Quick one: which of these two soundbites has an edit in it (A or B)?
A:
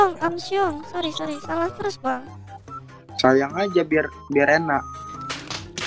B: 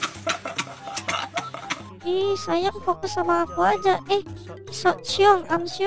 B